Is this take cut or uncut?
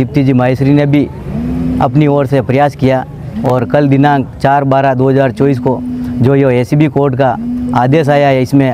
uncut